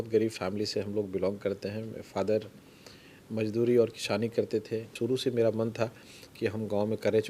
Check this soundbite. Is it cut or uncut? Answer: cut